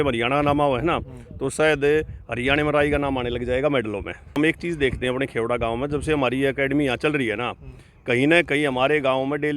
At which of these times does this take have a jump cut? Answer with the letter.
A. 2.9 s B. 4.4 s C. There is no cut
B